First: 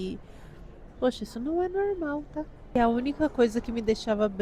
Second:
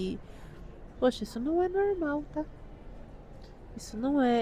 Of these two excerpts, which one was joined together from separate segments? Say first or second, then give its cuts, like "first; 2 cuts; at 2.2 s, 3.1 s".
first; 1 cut; at 2.8 s